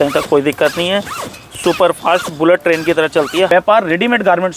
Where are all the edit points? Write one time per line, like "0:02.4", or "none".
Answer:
0:03.5